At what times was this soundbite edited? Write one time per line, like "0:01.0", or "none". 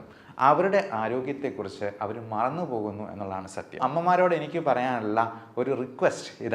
0:03.8